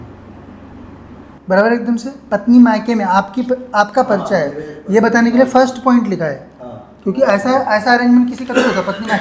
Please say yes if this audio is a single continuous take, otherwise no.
yes